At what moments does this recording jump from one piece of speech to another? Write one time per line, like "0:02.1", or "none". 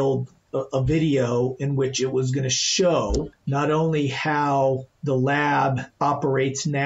0:03.3
0:04.9
0:05.9